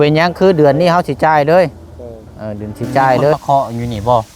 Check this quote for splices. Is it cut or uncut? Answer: cut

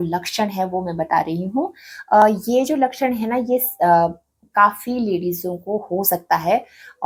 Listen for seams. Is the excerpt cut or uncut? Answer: uncut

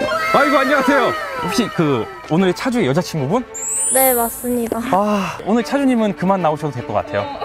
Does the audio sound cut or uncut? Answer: cut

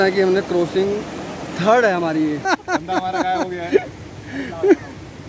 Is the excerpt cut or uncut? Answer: cut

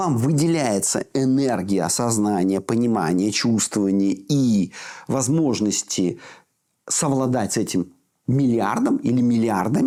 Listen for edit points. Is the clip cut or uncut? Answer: uncut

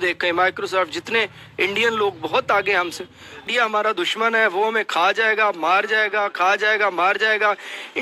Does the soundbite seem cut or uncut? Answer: cut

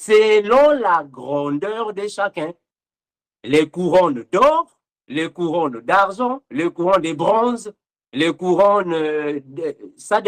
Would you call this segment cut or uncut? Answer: uncut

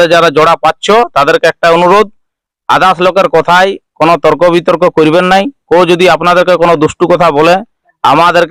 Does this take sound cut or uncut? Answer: uncut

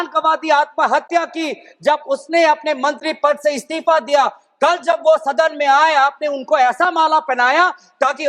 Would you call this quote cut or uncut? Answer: uncut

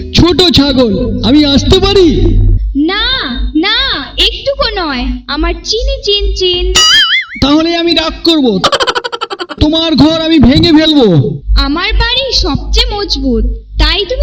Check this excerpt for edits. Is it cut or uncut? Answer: uncut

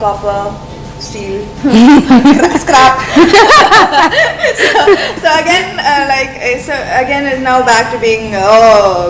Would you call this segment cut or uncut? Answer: uncut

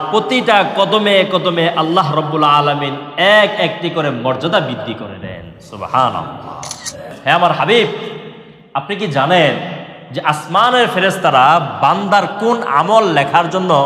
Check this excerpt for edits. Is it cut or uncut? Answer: cut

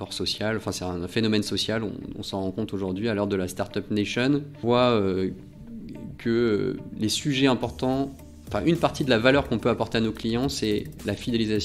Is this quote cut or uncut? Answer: cut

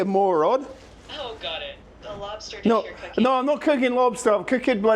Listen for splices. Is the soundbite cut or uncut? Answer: cut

